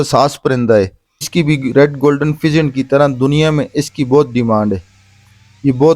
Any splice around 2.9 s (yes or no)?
no